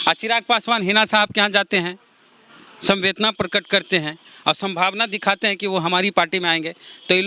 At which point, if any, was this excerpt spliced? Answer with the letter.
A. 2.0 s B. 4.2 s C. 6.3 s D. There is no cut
D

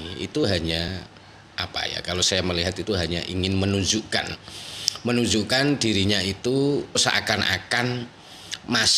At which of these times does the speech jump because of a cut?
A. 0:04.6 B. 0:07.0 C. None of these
B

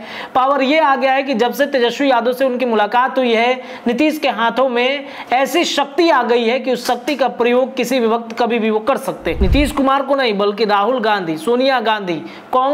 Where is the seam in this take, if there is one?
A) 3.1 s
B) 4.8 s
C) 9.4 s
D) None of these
C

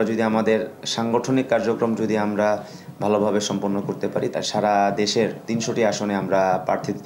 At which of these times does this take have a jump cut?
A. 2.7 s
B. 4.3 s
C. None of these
B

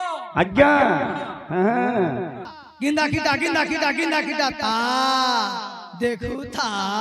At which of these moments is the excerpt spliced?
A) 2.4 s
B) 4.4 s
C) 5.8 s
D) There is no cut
A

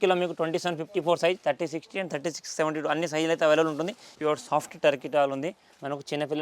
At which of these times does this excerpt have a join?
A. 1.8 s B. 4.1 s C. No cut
B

